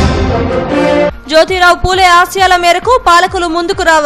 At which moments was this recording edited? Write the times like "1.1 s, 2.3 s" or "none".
1.1 s